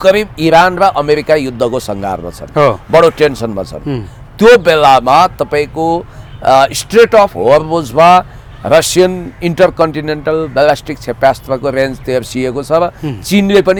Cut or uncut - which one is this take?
uncut